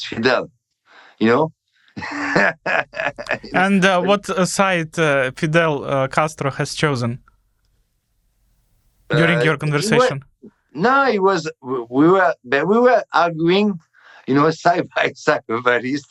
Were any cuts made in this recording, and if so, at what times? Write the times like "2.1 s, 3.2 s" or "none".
none